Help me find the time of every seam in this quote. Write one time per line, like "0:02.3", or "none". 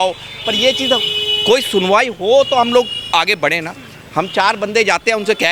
none